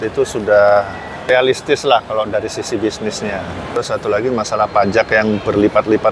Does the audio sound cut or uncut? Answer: cut